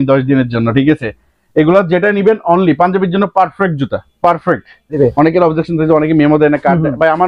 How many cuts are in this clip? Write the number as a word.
one